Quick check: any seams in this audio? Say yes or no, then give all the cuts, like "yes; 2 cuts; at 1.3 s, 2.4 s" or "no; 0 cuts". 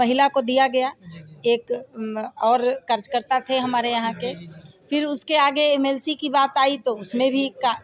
no; 0 cuts